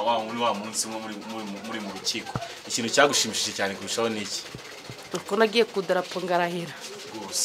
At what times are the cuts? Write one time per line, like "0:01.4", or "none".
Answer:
none